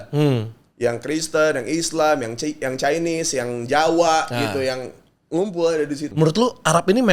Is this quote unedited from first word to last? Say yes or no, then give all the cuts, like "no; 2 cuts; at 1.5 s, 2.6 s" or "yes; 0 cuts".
no; 1 cut; at 6.1 s